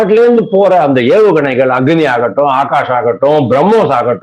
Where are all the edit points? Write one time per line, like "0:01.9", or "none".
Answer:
none